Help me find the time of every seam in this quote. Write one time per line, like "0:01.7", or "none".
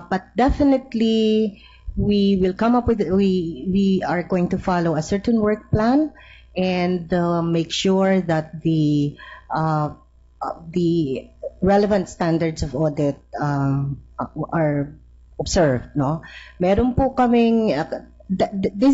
0:05.5